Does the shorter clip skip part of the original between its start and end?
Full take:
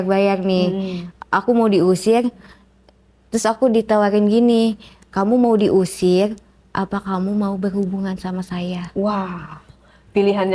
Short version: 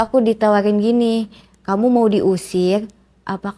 no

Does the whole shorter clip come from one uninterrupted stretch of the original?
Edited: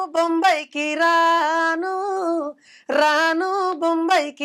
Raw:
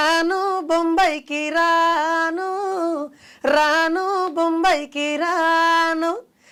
yes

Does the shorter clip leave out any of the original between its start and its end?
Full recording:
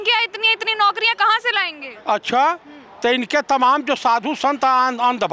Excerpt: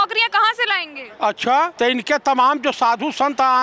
yes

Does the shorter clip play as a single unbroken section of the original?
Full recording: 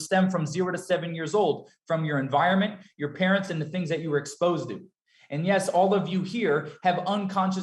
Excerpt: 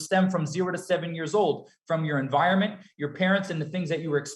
yes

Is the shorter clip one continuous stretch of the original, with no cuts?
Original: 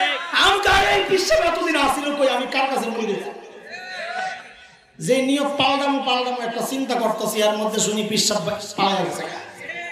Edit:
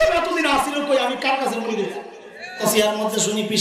no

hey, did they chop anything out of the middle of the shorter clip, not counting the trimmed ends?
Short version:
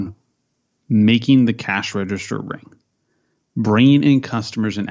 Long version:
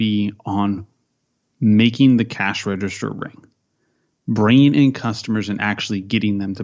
no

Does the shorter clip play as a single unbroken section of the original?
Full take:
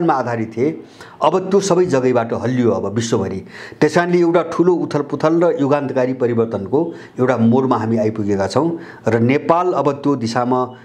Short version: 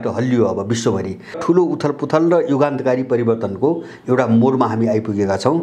no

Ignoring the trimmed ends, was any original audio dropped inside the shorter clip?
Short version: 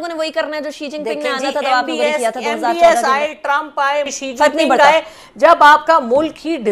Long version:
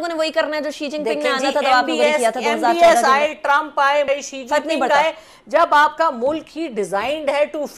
yes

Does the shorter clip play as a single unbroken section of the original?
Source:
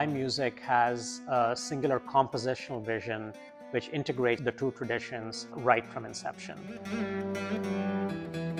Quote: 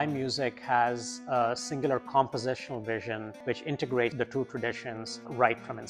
no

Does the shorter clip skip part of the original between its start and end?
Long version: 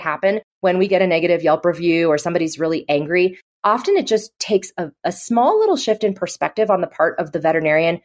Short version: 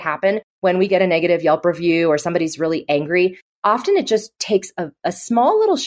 no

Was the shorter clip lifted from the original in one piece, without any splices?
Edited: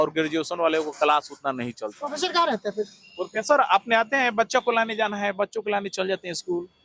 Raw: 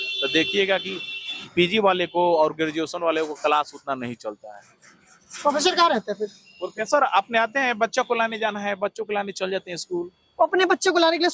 no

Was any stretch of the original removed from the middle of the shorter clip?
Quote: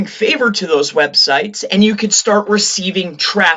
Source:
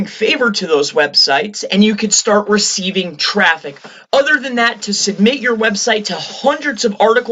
no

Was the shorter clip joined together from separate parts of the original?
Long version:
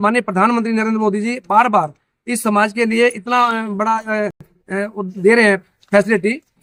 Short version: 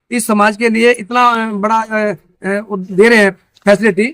yes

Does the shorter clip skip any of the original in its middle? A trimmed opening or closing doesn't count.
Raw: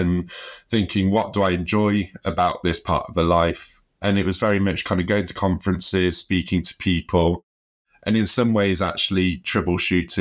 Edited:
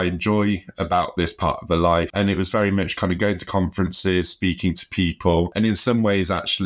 yes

